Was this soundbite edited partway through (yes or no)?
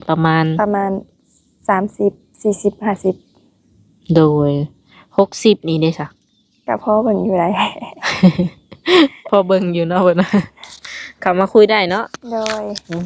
no